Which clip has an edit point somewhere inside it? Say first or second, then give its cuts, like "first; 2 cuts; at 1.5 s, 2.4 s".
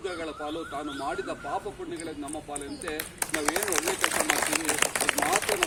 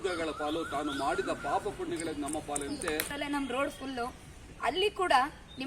second; 1 cut; at 3.1 s